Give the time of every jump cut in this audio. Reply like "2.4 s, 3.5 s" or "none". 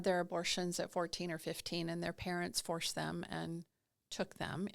none